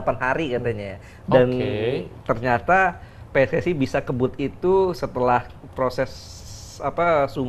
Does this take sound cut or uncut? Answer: uncut